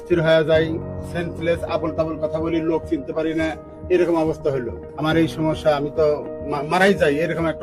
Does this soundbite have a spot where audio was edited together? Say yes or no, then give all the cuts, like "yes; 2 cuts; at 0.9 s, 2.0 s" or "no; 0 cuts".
yes; 1 cut; at 4.8 s